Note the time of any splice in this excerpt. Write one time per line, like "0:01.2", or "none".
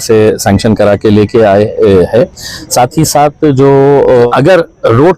0:04.3